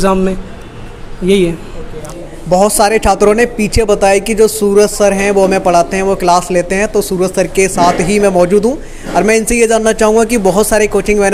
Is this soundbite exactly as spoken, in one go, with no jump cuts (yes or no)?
yes